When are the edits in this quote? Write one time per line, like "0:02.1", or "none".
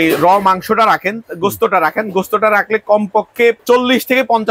0:03.6